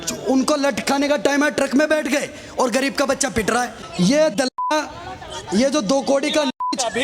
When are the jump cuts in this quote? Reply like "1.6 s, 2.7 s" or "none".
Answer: 3.8 s